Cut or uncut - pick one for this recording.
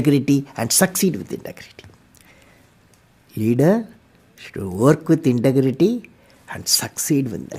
uncut